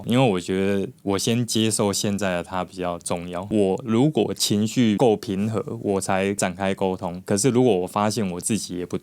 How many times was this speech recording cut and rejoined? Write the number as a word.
one